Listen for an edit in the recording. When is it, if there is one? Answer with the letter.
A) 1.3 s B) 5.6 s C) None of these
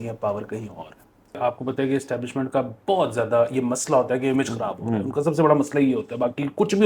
A